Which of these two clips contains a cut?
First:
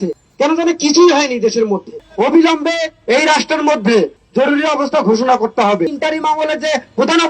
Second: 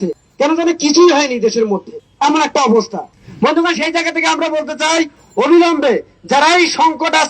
first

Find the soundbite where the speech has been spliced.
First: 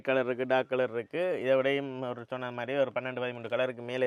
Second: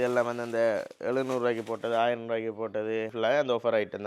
second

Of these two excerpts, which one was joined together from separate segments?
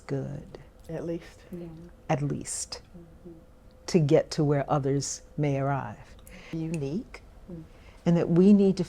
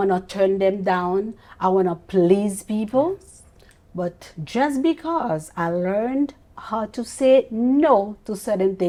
first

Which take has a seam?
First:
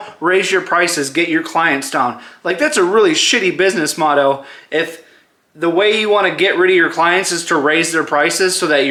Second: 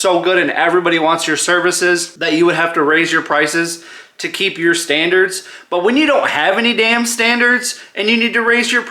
second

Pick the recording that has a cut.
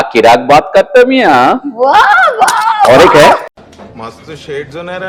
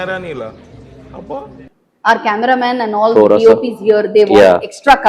second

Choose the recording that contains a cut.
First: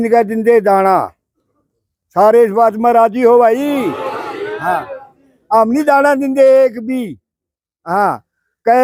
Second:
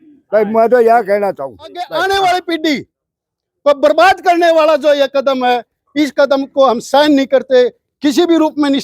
second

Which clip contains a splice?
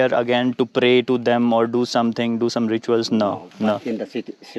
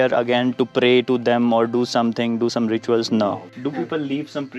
second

